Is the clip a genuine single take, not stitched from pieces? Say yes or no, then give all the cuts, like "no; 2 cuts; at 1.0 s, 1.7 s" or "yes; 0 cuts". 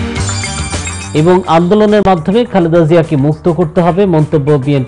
no; 1 cut; at 0.9 s